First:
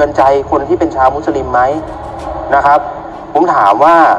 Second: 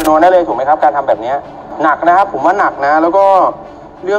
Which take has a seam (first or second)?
second